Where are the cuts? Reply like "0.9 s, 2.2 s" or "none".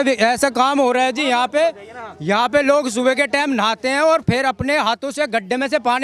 none